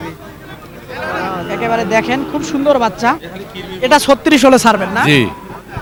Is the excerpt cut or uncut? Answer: uncut